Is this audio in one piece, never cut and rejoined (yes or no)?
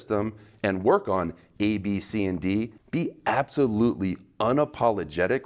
no